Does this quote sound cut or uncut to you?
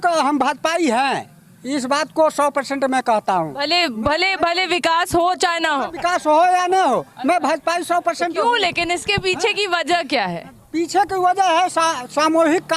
uncut